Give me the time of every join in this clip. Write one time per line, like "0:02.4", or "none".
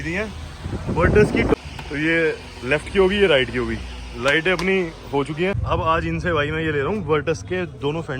0:01.7
0:05.6

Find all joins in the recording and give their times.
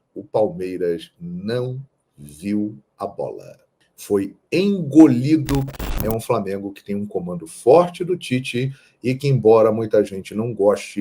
0:05.7

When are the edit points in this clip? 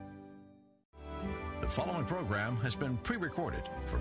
0:01.0

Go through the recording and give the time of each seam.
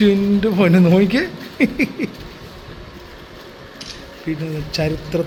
none

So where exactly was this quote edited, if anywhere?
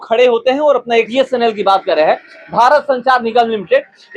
0:01.1

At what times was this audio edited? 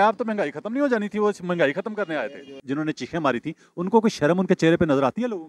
0:02.6

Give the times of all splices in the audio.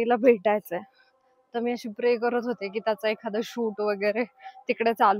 none

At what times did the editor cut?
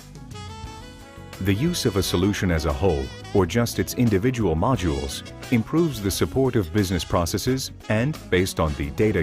0:01.4

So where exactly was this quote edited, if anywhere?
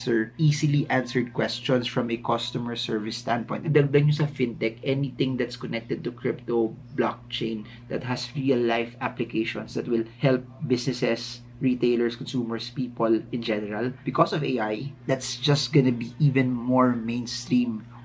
0:03.6
0:10.1
0:14.0

